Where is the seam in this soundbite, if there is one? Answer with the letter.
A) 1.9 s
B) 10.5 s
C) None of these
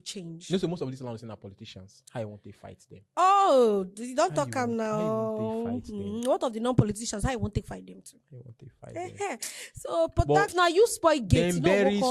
B